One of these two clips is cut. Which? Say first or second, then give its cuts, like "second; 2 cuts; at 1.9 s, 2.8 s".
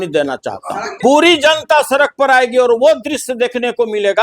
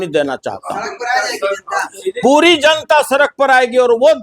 first; 1 cut; at 1.0 s